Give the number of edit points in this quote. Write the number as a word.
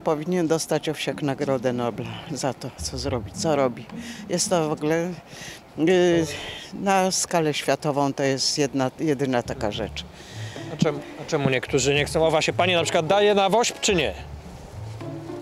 zero